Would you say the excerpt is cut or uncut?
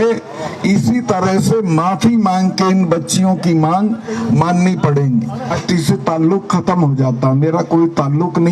cut